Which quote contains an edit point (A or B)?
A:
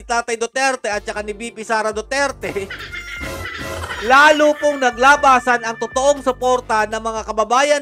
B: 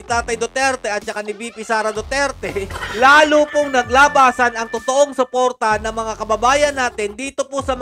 B